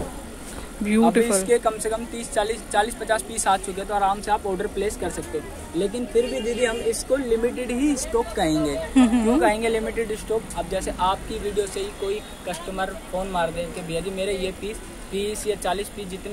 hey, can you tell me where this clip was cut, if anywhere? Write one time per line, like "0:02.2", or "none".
none